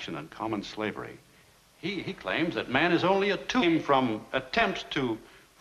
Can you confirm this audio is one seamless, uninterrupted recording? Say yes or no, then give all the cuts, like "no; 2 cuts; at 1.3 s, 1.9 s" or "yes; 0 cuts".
yes; 0 cuts